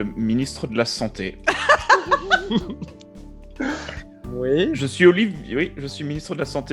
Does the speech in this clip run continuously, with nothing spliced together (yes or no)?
yes